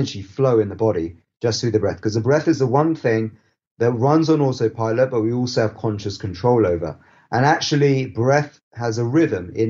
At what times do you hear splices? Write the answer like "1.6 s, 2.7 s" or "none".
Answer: none

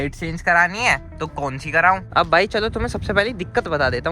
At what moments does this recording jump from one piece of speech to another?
2.0 s

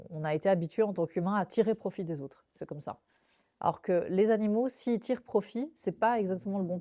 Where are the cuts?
none

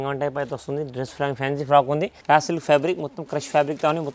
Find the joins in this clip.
2.1 s

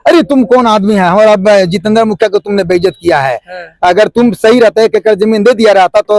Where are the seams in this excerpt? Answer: none

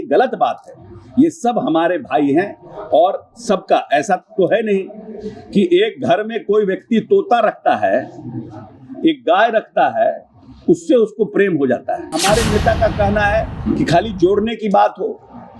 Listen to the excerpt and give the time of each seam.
12.2 s

